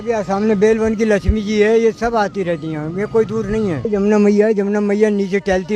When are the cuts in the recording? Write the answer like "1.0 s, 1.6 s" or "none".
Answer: 3.8 s